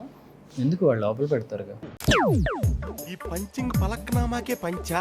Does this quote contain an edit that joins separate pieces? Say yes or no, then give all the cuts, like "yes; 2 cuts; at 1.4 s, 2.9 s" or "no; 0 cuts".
no; 0 cuts